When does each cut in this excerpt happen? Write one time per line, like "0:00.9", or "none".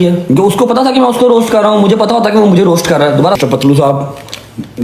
0:03.4